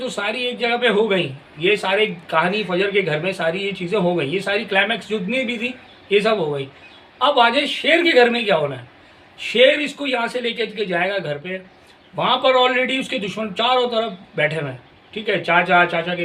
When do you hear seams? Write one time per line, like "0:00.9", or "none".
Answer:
none